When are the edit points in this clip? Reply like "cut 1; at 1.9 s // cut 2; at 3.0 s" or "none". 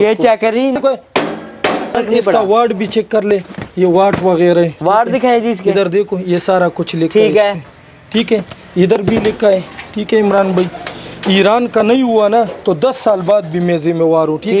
none

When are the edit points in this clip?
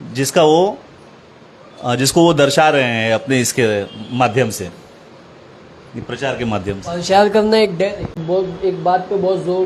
cut 1; at 8.2 s

